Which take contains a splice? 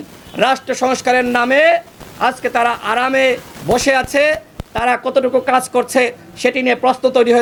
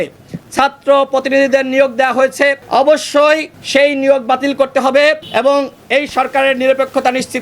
second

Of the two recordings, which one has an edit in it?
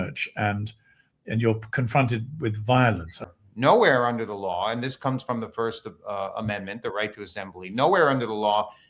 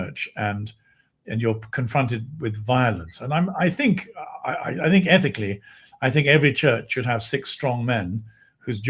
first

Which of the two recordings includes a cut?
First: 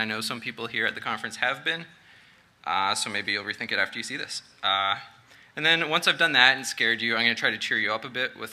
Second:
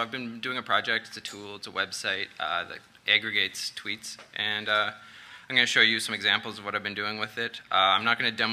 first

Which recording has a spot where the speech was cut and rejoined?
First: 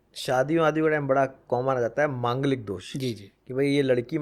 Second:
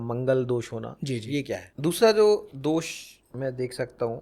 second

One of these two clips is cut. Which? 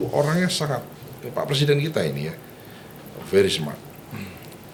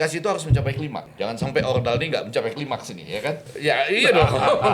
second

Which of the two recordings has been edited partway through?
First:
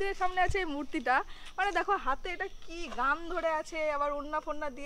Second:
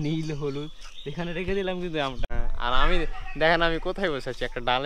second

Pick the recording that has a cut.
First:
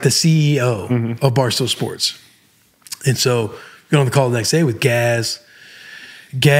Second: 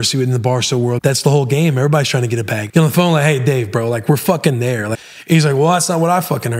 second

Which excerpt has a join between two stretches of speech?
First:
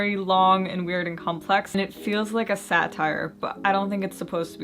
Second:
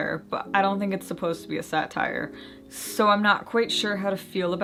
first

